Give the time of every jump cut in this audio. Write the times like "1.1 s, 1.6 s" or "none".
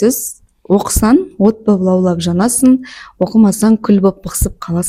none